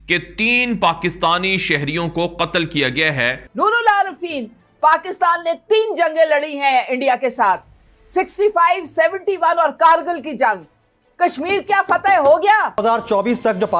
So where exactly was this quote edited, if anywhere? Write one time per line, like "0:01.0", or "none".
0:03.5
0:12.8